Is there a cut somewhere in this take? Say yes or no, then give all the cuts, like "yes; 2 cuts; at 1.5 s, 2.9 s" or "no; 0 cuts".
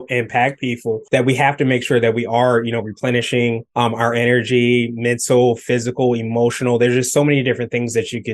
yes; 2 cuts; at 1.0 s, 3.6 s